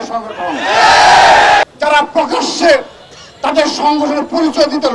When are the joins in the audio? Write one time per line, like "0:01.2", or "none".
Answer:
0:01.6

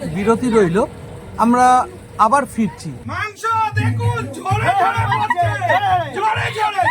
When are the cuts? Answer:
0:03.1

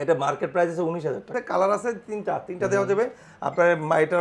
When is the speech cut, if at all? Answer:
0:01.3

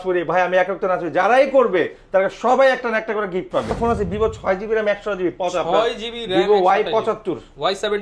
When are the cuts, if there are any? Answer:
0:03.8

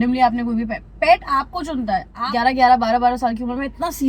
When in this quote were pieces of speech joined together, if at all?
0:02.1

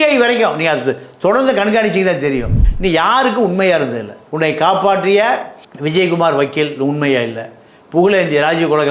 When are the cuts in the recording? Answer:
0:02.6

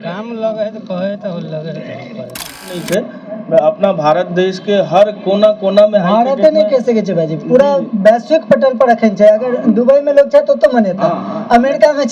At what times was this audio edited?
0:02.6

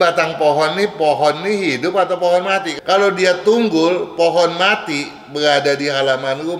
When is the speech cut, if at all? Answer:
0:02.7

